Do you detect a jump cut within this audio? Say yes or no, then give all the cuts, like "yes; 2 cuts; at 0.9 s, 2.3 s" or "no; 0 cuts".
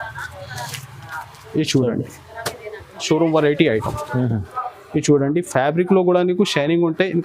yes; 1 cut; at 3.0 s